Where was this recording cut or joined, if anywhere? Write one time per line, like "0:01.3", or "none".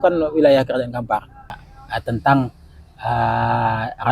0:01.7